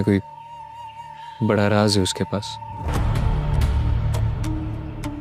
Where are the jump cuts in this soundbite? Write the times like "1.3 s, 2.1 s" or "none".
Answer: none